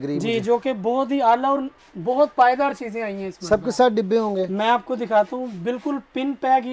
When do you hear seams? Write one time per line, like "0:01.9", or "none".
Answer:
none